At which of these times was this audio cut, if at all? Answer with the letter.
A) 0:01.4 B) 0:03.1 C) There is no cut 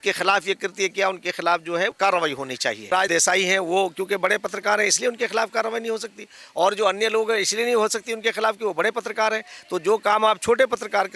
B